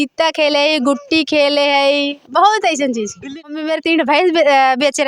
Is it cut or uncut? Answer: cut